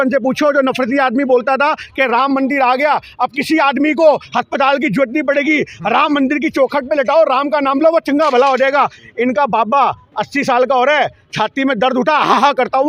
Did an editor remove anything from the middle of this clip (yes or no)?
no